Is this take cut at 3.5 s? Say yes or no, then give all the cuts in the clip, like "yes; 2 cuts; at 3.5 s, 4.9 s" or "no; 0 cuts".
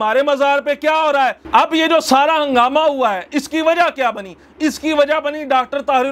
no; 1 cut; at 1.4 s